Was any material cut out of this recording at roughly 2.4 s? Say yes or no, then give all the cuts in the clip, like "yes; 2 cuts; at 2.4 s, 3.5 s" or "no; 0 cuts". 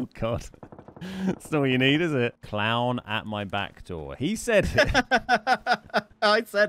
yes; 1 cut; at 2.4 s